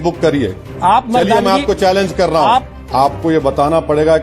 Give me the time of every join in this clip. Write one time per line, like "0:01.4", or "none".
0:02.7